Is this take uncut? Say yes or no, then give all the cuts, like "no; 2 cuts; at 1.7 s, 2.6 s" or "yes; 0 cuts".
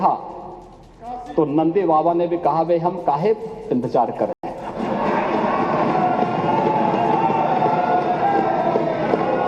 yes; 0 cuts